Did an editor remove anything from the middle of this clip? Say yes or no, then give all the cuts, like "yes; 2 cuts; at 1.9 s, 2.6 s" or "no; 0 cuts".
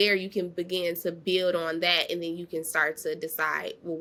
no; 0 cuts